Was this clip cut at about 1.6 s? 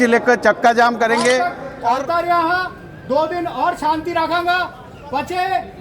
yes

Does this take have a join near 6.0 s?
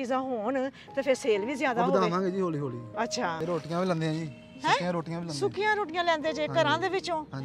no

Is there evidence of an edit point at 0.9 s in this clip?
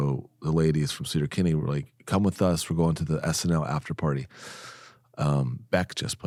no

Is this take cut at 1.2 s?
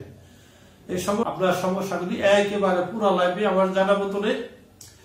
yes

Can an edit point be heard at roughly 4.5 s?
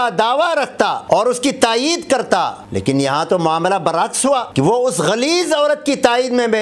yes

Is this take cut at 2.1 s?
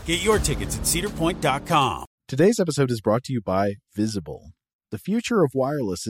yes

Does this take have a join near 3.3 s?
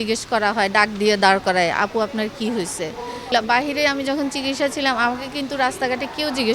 yes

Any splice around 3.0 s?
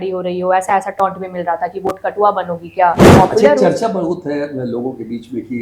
yes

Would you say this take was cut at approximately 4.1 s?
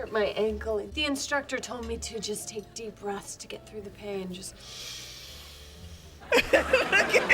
no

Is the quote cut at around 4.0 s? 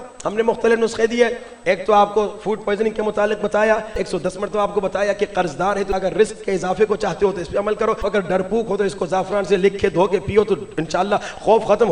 yes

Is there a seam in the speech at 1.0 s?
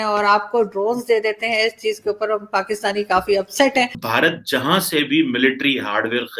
no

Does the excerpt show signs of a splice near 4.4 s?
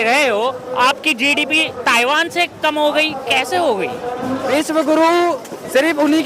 yes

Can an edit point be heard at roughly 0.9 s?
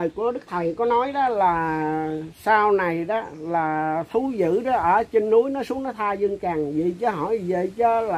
no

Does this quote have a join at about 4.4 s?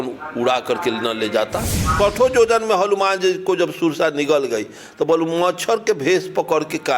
no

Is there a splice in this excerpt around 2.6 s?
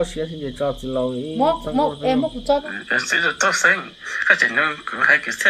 yes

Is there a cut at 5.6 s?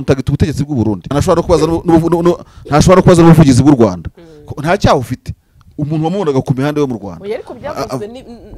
no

